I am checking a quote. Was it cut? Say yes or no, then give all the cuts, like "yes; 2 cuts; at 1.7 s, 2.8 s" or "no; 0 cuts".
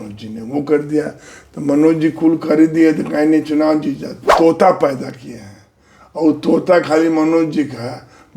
yes; 1 cut; at 4.2 s